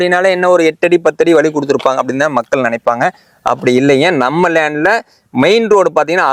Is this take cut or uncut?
uncut